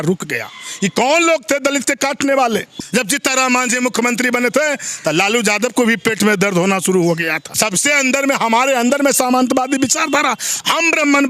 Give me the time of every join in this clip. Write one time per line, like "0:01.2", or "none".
0:02.8
0:07.5